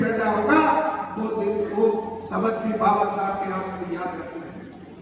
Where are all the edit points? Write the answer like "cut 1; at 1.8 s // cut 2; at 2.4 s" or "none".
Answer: none